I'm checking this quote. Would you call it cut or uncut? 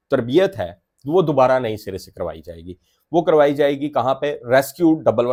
uncut